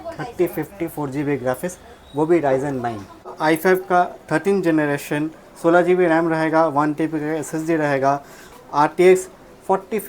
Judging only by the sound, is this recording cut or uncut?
cut